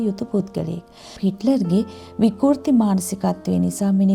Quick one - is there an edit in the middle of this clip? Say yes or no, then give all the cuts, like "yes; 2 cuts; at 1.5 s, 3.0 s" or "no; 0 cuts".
yes; 1 cut; at 1.2 s